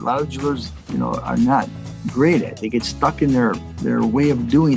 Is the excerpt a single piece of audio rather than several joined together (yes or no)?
yes